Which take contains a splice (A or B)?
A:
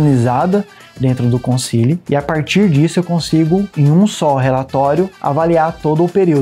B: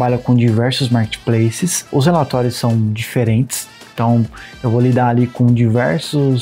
A